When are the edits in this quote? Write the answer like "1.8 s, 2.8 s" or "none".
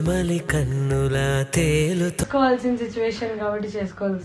2.2 s